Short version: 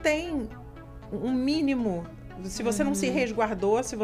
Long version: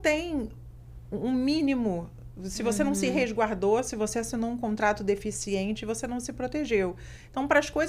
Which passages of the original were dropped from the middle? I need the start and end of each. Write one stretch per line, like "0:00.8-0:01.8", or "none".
none